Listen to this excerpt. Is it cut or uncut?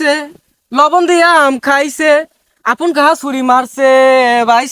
uncut